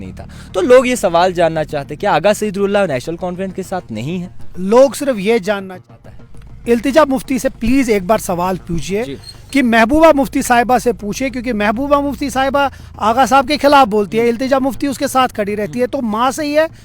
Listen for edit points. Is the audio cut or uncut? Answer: cut